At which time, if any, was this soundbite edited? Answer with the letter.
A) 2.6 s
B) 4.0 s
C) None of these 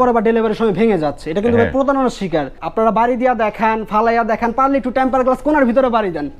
A